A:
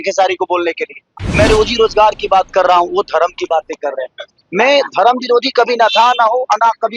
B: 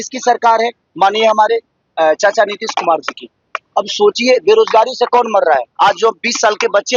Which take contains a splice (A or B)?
A